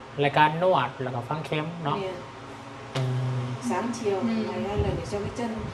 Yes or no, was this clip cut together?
no